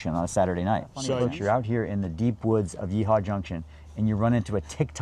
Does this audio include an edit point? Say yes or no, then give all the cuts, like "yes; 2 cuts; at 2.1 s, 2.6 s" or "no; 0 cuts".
yes; 1 cut; at 1.2 s